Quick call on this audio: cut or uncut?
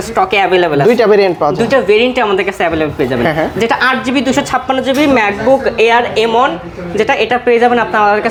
uncut